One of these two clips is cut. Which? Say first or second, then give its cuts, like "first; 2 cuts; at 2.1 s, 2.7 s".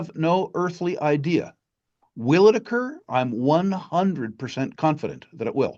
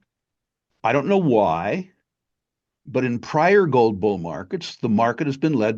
first; 1 cut; at 4.7 s